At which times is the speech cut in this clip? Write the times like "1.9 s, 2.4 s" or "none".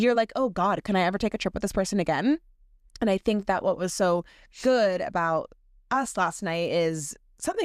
none